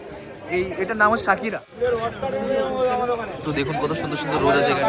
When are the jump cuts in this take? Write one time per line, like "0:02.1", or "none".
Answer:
0:01.6